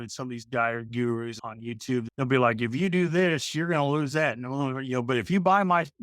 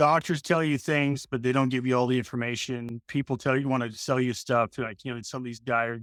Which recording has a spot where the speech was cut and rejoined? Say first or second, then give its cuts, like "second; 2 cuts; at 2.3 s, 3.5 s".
first; 1 cut; at 1.9 s